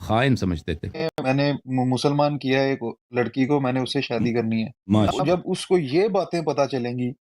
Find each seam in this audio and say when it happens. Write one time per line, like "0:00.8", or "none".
0:01.1
0:05.1